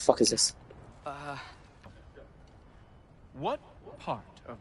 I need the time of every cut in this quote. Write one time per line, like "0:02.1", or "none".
0:02.1